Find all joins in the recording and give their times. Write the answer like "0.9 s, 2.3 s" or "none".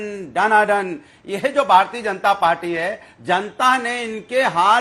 none